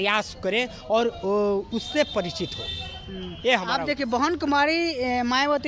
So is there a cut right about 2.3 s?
no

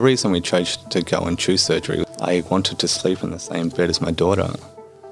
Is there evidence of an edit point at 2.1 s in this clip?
yes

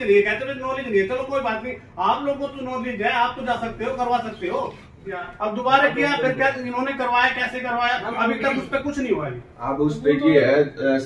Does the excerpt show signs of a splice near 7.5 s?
no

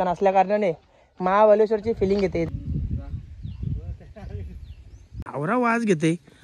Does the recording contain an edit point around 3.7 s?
no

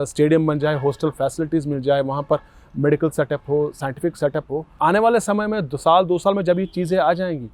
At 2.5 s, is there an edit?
no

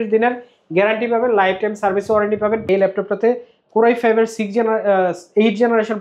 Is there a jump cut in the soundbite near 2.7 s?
yes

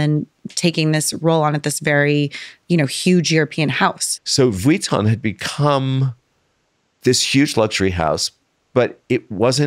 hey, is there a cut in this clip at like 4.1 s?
yes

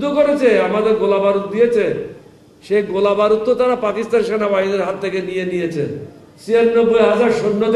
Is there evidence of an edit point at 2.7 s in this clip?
no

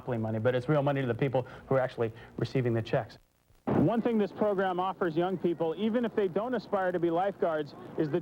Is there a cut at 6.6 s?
no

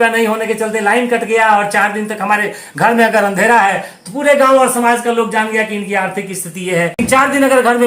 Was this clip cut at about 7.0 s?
yes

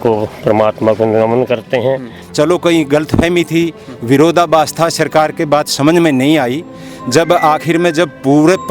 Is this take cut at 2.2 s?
yes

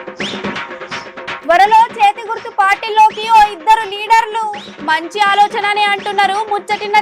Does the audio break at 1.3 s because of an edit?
yes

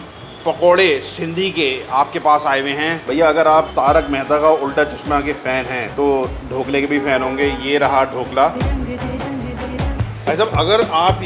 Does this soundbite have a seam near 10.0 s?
yes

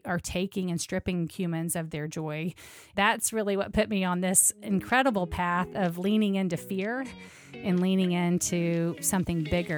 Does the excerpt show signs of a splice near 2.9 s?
yes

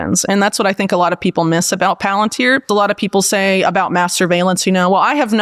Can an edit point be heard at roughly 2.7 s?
yes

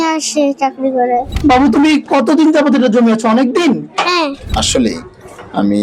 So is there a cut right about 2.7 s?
no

